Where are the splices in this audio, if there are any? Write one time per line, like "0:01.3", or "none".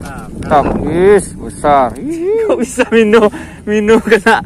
0:02.5